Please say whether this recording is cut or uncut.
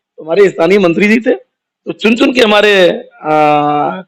uncut